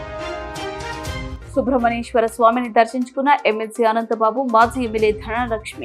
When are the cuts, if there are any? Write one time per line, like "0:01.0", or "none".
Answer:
0:01.4